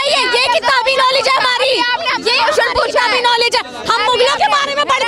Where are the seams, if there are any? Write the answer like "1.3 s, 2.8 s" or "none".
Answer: none